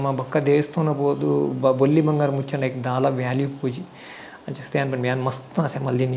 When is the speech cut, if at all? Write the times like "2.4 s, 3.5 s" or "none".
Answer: none